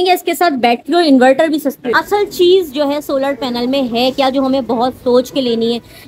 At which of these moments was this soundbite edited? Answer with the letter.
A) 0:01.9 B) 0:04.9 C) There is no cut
A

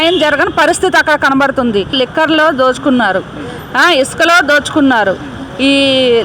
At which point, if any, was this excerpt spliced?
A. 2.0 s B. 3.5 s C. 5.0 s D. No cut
A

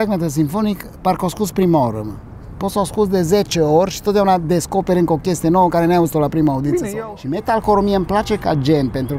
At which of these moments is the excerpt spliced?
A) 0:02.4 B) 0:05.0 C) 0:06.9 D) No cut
C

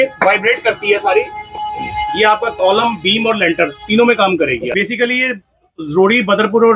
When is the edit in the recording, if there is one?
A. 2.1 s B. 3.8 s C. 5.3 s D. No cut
D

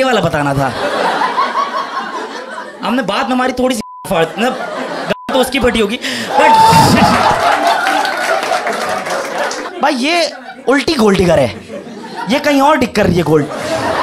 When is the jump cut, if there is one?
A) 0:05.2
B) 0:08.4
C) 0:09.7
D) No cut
C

